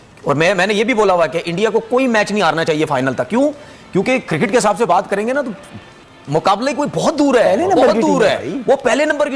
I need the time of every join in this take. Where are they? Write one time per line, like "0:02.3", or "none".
none